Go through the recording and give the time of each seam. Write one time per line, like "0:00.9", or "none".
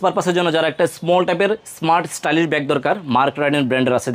none